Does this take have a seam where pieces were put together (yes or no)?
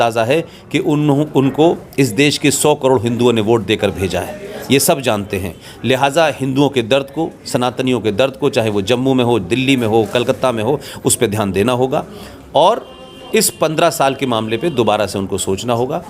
no